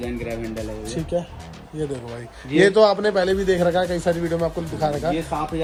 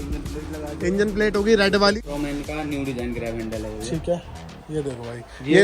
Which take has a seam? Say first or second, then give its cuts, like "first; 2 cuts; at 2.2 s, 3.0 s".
second; 1 cut; at 2.0 s